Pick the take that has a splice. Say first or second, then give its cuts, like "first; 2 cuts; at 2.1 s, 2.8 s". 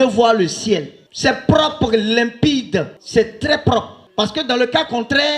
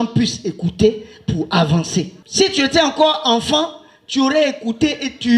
first; 1 cut; at 4.0 s